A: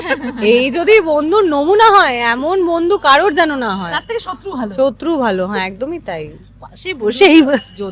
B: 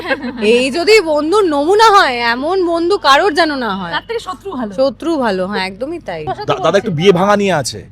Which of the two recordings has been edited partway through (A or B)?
B